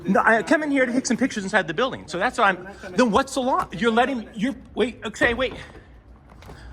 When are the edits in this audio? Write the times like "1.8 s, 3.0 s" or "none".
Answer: none